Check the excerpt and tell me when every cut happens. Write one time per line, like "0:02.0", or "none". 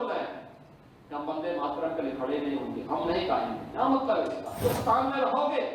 0:04.6